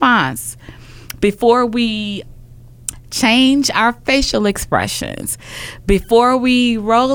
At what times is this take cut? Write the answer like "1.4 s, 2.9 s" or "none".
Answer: 2.2 s